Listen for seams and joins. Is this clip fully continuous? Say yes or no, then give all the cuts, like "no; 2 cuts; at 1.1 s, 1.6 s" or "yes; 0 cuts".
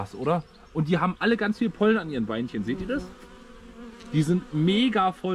yes; 0 cuts